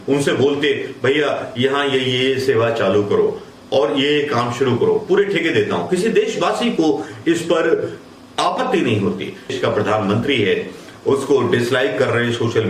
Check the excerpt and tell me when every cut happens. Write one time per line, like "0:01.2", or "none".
0:09.5